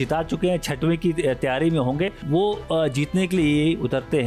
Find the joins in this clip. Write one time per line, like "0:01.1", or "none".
0:02.1